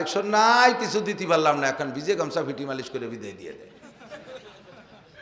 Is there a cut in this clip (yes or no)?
no